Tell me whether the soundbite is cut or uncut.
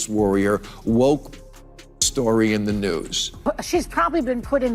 cut